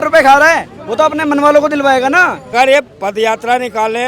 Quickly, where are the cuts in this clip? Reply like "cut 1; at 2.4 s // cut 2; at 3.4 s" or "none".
cut 1; at 2.4 s